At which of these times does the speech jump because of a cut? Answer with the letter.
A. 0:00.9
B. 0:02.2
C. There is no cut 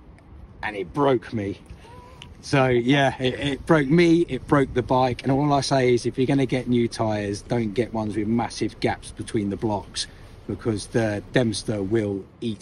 C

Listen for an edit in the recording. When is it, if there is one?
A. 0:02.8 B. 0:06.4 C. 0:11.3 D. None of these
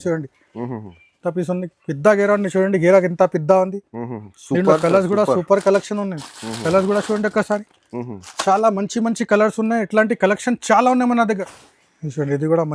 C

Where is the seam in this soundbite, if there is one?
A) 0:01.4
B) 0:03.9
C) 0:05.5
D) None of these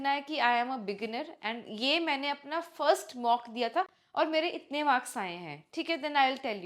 D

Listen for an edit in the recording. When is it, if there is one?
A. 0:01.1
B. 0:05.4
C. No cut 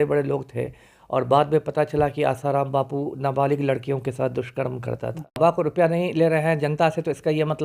B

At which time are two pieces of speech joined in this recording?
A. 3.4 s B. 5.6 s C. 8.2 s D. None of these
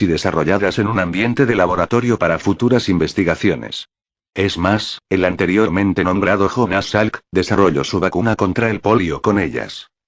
D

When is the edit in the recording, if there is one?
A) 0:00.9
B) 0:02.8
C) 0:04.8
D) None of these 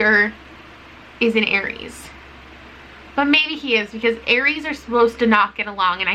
D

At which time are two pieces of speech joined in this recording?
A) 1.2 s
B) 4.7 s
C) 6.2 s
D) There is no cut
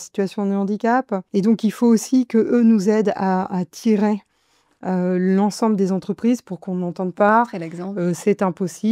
A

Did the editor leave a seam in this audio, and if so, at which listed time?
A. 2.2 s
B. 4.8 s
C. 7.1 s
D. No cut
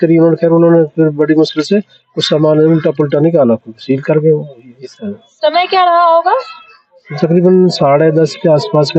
D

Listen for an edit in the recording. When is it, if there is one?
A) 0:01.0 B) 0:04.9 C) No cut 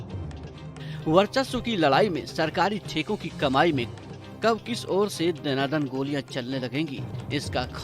A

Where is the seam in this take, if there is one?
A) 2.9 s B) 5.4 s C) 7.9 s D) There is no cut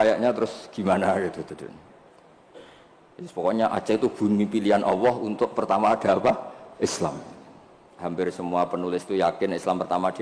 C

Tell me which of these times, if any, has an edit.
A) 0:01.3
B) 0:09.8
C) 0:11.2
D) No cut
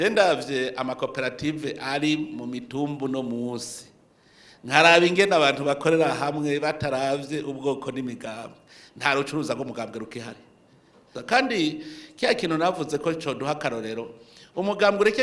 C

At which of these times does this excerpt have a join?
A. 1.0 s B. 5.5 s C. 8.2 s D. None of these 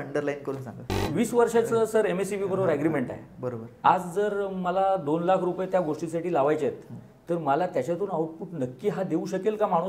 A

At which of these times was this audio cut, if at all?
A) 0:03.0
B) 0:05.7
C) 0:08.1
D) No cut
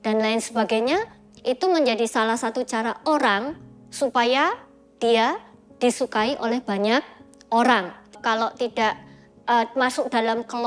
C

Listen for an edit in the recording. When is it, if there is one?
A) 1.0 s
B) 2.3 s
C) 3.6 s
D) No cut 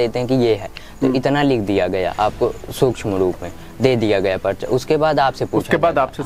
D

